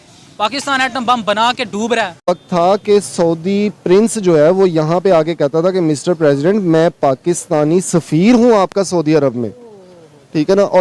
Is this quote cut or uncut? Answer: cut